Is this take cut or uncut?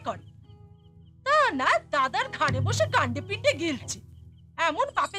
uncut